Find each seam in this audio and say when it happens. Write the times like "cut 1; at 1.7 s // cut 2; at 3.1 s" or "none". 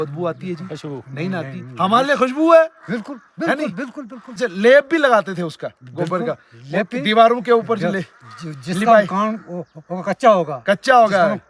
cut 1; at 4.3 s

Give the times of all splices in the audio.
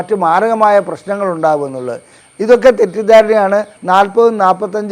cut 1; at 3.7 s

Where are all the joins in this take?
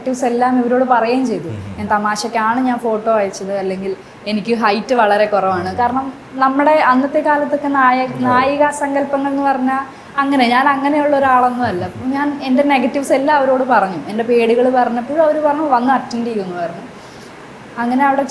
none

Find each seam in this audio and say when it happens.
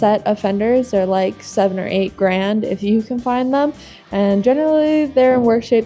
none

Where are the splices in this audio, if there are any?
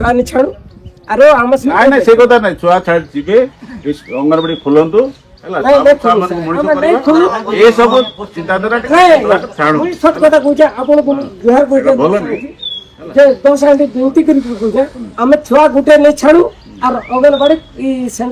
none

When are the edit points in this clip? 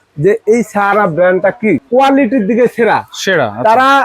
cut 1; at 1.8 s

